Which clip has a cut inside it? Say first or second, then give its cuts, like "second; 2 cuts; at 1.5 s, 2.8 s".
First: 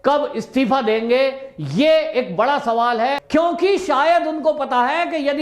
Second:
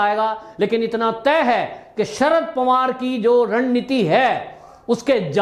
first; 1 cut; at 3.2 s